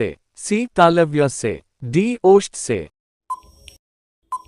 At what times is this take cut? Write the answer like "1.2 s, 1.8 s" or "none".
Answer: 3.0 s